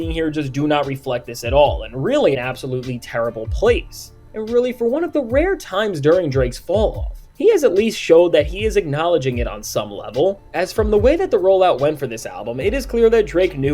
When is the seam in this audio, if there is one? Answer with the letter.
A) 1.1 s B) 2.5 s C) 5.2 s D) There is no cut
B